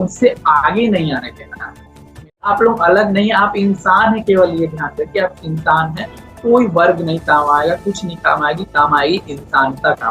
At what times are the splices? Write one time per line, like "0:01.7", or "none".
0:02.4